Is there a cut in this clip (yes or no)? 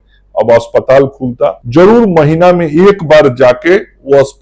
yes